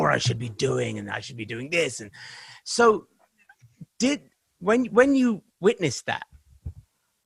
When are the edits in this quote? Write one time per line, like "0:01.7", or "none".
none